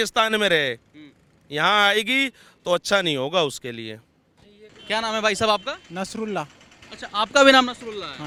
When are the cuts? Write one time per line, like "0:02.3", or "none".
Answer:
none